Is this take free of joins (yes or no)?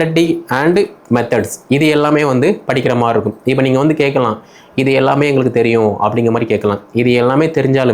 yes